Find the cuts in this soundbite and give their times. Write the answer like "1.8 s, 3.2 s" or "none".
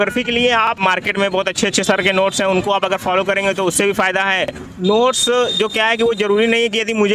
0.8 s, 4.6 s